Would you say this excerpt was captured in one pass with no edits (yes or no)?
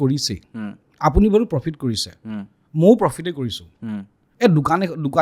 yes